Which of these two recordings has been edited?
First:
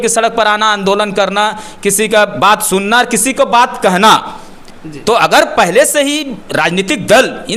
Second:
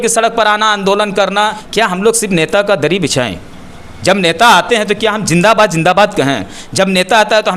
second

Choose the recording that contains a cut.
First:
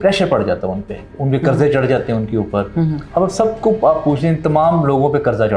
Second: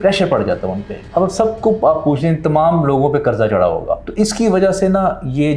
second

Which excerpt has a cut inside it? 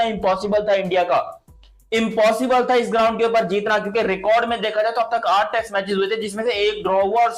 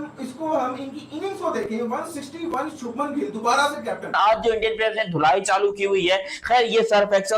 second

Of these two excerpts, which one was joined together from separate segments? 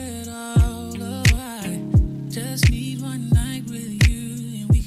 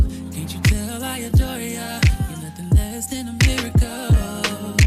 first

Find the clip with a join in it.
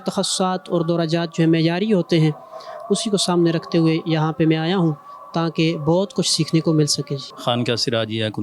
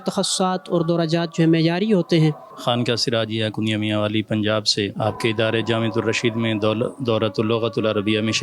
second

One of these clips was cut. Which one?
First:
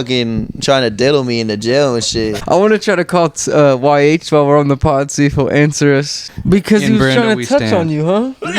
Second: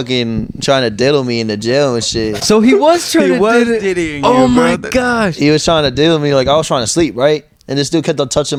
first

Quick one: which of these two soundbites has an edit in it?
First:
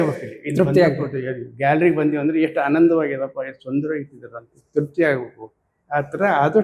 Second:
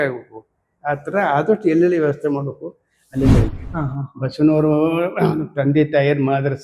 second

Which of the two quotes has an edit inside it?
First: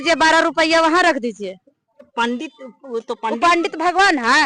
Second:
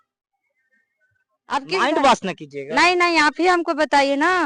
first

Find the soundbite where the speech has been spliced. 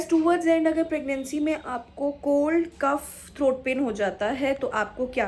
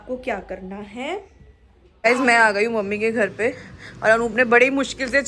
second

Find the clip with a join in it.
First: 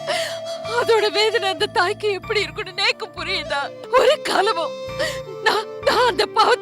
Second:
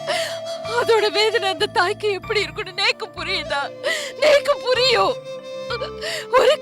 first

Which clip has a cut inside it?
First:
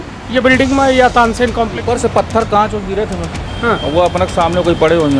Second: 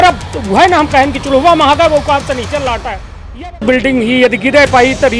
second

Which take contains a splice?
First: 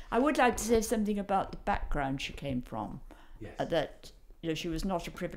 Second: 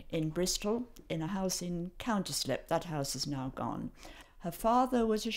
second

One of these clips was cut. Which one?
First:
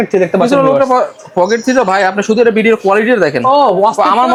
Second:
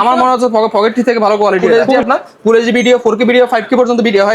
second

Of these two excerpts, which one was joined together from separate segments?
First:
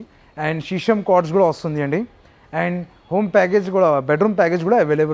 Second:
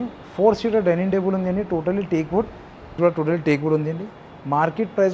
second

